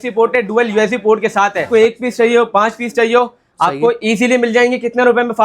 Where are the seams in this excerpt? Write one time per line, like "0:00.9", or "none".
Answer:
0:01.7